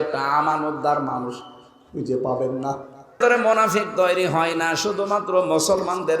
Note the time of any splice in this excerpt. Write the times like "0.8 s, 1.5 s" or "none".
3.2 s